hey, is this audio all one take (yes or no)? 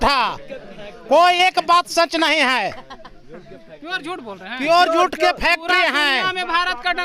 yes